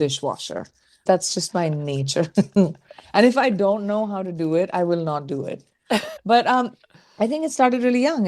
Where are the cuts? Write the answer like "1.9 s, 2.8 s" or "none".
1.0 s, 6.1 s